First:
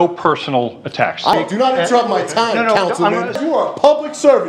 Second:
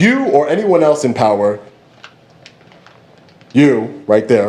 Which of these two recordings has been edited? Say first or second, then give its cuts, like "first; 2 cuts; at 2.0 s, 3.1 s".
first; 2 cuts; at 1.3 s, 3.4 s